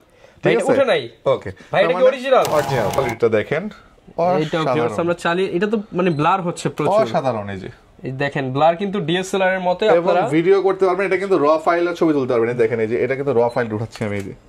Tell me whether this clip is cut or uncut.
cut